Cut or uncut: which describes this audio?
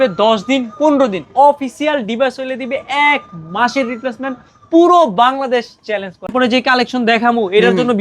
cut